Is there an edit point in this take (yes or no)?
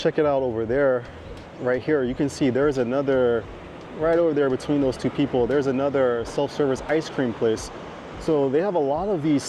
no